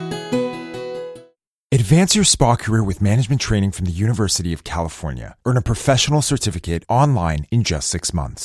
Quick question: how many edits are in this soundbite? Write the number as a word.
one